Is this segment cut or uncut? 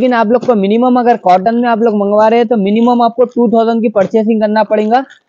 uncut